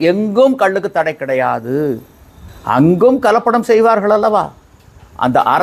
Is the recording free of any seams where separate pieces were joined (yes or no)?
yes